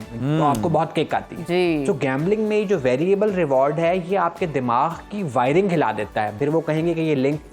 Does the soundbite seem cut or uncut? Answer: cut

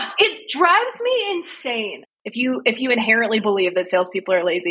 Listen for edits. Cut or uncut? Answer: cut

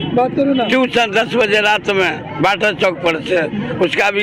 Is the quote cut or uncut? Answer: uncut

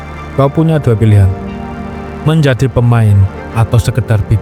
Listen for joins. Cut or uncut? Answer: uncut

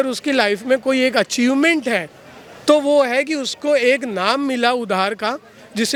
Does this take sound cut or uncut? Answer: uncut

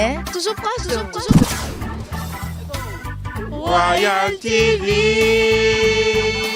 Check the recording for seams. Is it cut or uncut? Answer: uncut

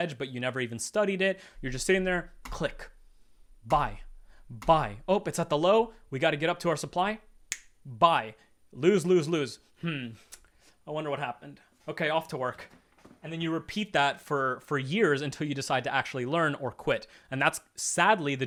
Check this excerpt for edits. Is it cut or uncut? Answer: uncut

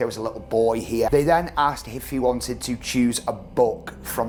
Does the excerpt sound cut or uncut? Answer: uncut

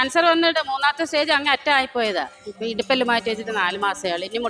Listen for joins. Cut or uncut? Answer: cut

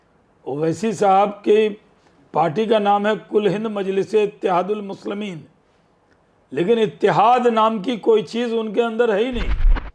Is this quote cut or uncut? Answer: uncut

